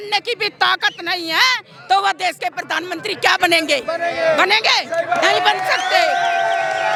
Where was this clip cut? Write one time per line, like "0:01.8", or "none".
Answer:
none